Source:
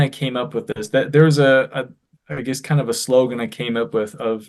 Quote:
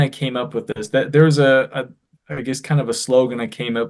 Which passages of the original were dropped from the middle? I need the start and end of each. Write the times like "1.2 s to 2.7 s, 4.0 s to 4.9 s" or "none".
none